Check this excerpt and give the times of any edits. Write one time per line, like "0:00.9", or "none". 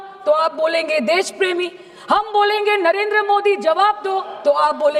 none